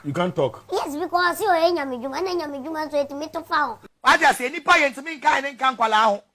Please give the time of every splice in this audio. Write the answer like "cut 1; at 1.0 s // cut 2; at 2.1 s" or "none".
cut 1; at 3.8 s